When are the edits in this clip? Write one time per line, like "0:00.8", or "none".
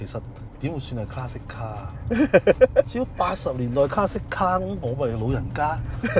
none